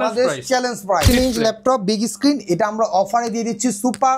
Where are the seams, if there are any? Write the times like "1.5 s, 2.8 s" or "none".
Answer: 1.1 s